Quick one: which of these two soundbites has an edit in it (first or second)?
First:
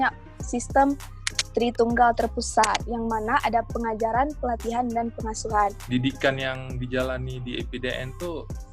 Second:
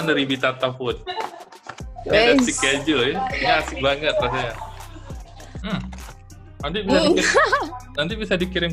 first